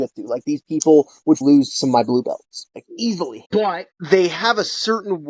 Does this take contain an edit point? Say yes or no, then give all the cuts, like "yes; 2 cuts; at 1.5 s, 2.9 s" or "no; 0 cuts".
yes; 2 cuts; at 1.4 s, 3.4 s